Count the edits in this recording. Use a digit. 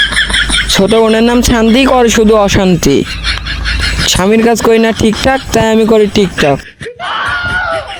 0